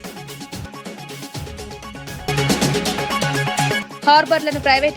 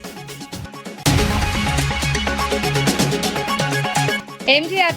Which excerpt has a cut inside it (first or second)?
second